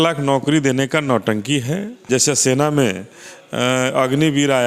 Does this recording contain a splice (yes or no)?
yes